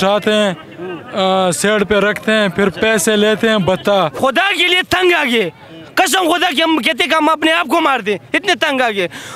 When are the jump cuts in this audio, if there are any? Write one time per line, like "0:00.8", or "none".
0:04.1